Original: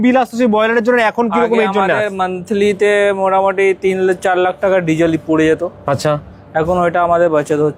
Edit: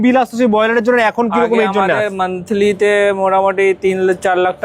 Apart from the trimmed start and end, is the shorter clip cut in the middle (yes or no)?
no